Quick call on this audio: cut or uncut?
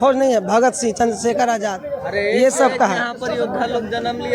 uncut